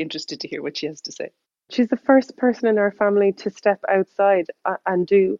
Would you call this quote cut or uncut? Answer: cut